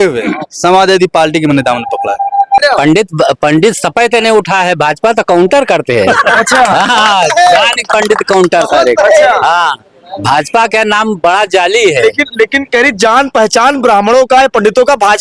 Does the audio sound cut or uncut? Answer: cut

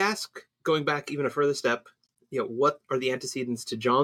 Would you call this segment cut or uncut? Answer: uncut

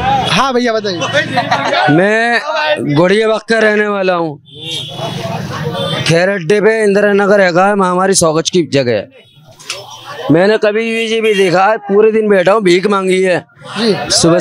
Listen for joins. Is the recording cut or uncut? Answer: uncut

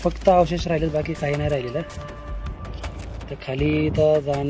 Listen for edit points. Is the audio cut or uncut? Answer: cut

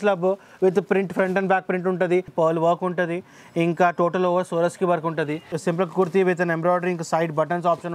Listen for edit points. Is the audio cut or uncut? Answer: cut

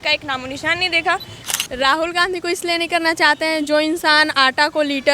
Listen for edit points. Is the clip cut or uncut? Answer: cut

